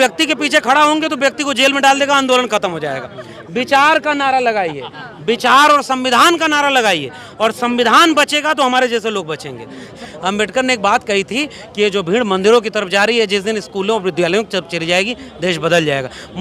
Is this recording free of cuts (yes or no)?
no